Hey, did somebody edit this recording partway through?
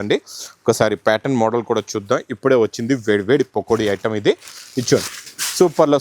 no; 0 cuts

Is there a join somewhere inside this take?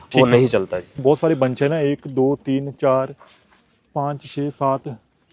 yes; 1 cut; at 1.0 s

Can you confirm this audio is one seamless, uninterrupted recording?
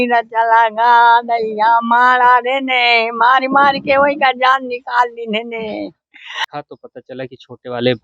no; 1 cut; at 6.4 s

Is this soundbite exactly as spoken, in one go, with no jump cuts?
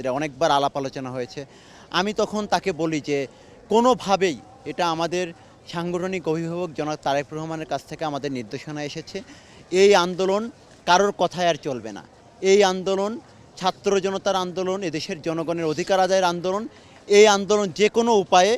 yes; 0 cuts

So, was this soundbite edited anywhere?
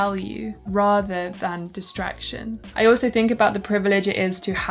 yes; 1 cut; at 2.7 s

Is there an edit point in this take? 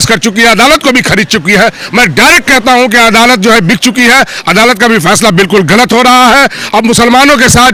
no; 0 cuts

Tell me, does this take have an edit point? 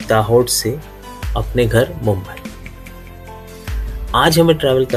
no; 0 cuts

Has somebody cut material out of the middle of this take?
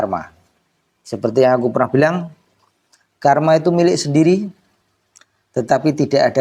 no; 0 cuts

